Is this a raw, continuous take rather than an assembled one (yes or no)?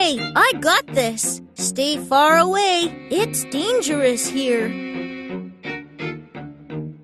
no